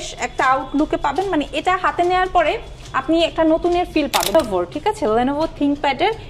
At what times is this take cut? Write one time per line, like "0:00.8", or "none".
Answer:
0:04.3